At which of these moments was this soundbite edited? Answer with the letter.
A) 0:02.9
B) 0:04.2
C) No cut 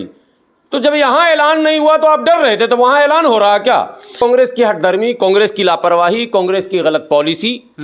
B